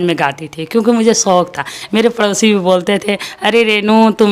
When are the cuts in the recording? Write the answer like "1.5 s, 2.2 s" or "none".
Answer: none